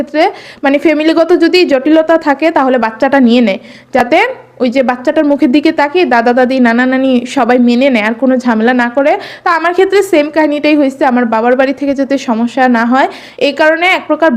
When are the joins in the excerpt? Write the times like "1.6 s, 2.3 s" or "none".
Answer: none